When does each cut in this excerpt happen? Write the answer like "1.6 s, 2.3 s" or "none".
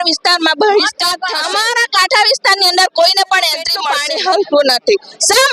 1.4 s, 3.9 s